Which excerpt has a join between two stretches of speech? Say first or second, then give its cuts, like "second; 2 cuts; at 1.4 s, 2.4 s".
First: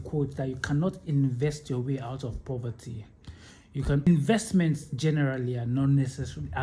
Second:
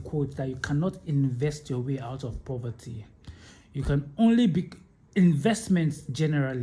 first; 1 cut; at 4.1 s